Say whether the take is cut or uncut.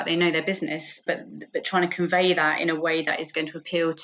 cut